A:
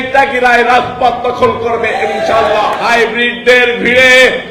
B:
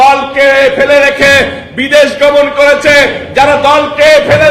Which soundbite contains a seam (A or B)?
A